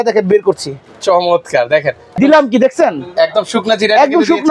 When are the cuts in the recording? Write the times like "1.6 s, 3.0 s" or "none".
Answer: 2.1 s